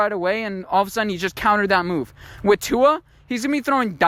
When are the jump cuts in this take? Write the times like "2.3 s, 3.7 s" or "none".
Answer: none